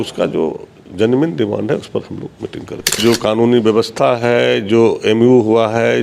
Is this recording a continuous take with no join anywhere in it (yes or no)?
no